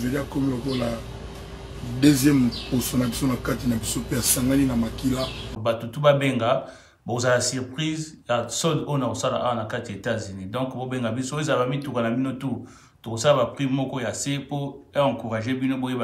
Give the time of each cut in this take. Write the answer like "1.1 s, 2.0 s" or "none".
5.5 s